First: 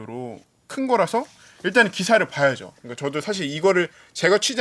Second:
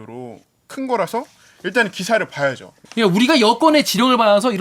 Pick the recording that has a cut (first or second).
second